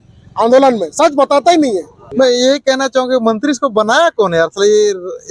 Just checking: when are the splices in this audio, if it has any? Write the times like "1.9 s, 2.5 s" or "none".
2.0 s